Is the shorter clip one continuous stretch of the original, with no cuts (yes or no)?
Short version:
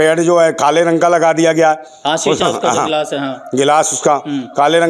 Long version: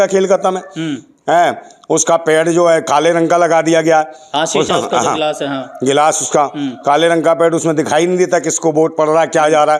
yes